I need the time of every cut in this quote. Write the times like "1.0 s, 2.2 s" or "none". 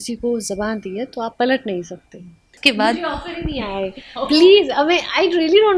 2.6 s